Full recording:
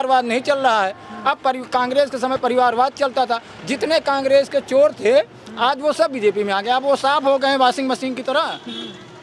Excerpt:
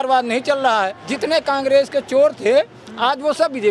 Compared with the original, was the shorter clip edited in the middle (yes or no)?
yes